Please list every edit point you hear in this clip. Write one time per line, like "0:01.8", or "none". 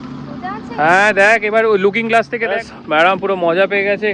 0:02.6